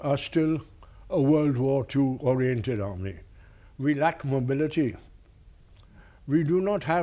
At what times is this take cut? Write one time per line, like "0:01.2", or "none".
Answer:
0:04.7